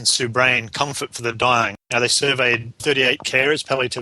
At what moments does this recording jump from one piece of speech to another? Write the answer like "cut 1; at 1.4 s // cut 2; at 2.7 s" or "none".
cut 1; at 1.8 s // cut 2; at 2.8 s